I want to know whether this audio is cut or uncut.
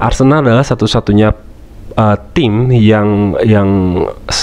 uncut